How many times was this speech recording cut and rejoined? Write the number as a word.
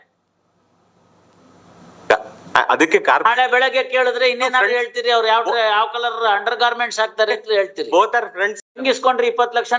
one